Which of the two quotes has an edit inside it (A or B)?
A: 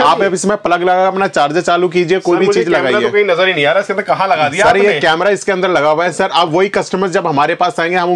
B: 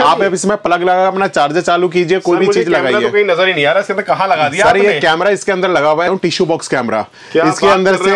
B